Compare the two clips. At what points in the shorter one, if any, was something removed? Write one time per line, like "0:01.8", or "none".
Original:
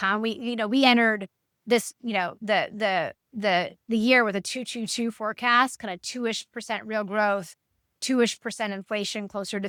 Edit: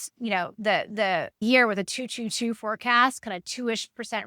0:01.4